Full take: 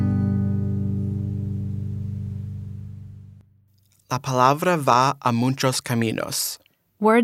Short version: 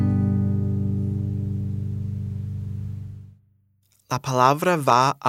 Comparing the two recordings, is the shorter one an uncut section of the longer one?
yes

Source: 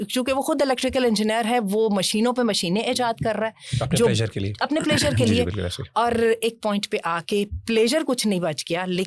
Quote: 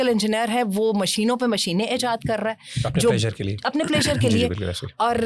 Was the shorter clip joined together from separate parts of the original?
no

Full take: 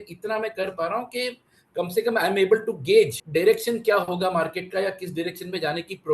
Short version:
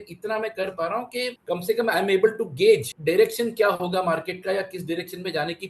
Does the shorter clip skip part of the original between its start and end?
yes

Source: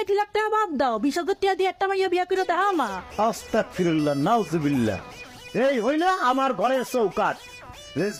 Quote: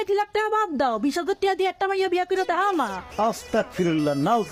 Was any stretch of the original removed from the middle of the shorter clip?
no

